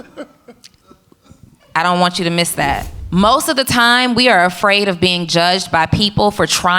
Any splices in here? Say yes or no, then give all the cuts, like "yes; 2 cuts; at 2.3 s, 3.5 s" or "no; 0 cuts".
yes; 1 cut; at 2.9 s